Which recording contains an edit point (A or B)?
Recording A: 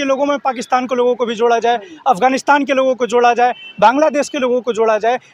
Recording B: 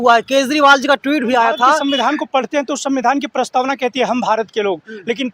B